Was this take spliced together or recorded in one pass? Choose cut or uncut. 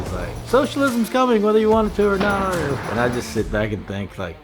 cut